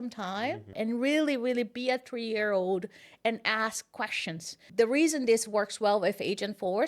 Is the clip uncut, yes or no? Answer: no